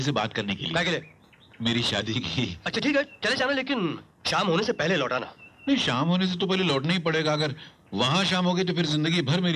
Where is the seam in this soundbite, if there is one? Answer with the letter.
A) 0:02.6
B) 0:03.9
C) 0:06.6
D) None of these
A